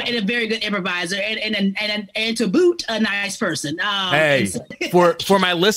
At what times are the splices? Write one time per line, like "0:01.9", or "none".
0:04.8